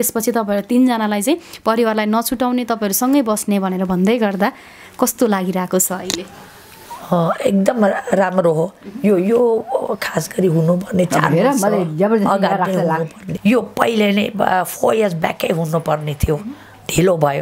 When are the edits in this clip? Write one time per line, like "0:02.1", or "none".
0:13.2